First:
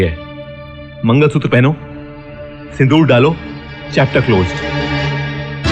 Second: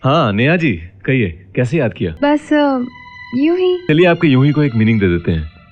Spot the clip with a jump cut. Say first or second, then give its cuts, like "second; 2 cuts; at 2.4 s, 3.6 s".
second; 2 cuts; at 2.1 s, 3.8 s